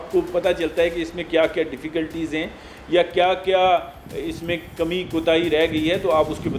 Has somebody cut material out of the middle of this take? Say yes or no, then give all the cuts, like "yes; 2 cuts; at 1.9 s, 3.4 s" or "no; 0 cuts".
no; 0 cuts